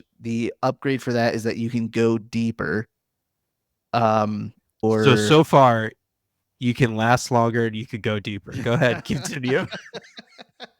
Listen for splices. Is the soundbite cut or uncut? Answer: cut